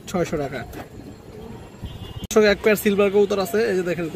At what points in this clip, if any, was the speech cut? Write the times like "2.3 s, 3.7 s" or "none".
2.3 s